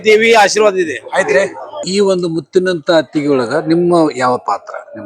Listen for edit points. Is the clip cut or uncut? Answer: cut